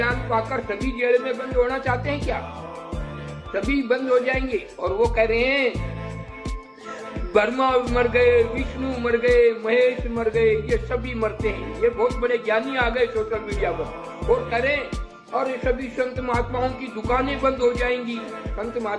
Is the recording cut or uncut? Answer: uncut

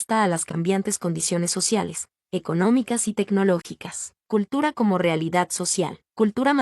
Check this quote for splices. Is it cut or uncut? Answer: cut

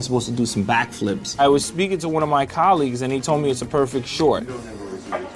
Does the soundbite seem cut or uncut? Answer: cut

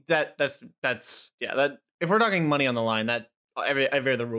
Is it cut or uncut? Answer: uncut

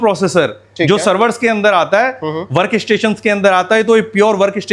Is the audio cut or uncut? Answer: uncut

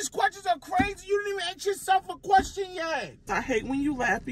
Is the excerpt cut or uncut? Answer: cut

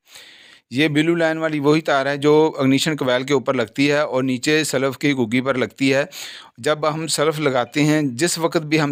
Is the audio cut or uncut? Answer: uncut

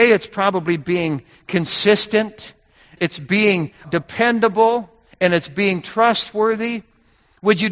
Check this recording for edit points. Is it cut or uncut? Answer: cut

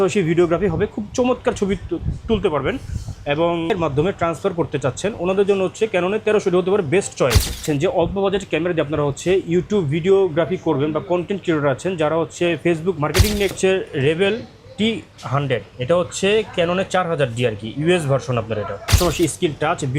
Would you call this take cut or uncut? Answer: cut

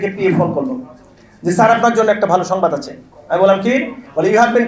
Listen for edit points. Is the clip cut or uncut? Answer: uncut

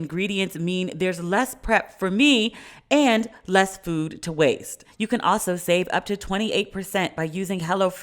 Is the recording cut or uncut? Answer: cut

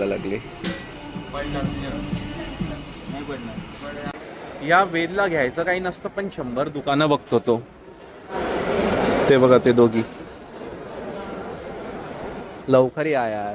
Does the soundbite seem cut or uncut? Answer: uncut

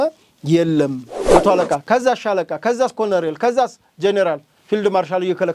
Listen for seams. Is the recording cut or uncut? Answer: cut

